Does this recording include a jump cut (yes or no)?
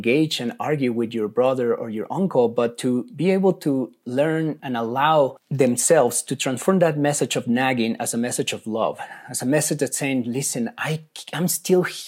yes